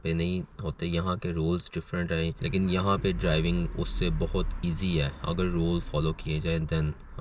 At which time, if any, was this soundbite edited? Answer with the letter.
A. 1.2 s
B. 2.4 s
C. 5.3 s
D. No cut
B